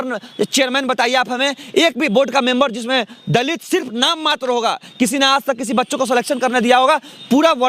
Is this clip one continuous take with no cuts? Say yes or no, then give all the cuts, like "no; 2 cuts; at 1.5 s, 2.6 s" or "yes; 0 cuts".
yes; 0 cuts